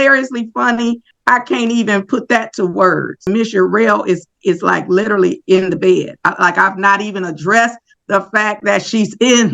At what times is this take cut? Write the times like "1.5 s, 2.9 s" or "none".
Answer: 1.1 s, 3.3 s